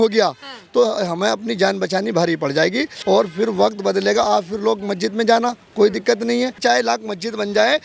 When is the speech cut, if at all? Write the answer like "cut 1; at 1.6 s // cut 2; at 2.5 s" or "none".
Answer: cut 1; at 2.9 s // cut 2; at 6.6 s